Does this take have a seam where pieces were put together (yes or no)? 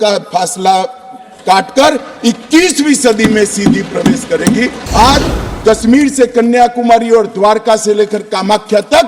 yes